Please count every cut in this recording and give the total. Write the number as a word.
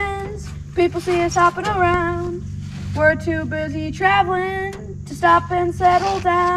zero